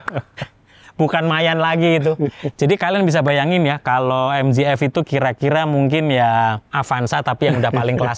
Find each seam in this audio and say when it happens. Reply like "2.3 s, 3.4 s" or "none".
none

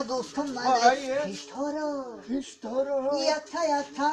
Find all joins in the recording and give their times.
1.4 s

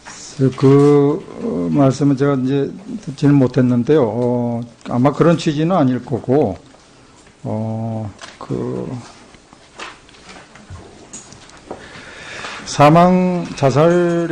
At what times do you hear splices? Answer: 9.0 s

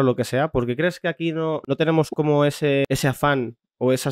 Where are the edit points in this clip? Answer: 1.6 s, 2.8 s

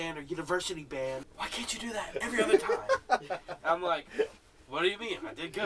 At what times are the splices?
1.3 s

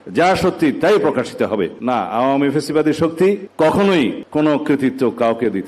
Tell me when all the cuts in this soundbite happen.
1.8 s, 3.5 s, 4.2 s

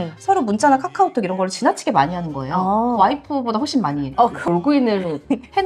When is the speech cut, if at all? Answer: 4.5 s

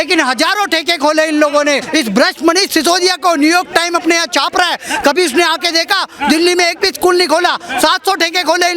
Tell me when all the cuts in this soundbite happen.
1.8 s

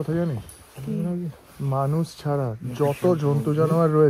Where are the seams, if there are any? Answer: none

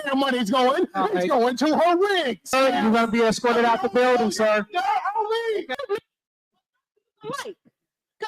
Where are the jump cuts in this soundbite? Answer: 2.5 s, 5.7 s

